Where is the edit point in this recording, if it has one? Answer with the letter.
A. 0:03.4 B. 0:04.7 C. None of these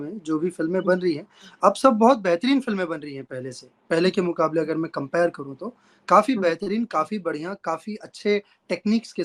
C